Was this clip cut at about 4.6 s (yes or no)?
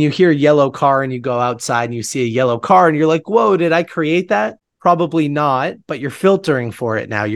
yes